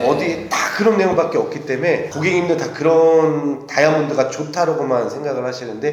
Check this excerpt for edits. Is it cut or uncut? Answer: cut